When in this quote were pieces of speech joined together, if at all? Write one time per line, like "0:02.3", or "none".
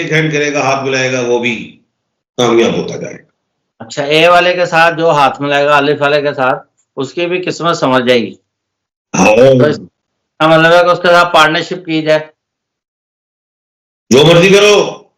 none